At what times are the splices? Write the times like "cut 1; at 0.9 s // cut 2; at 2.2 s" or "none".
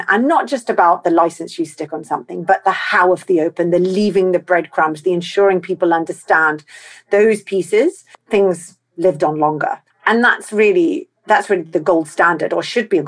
cut 1; at 8.1 s // cut 2; at 9.9 s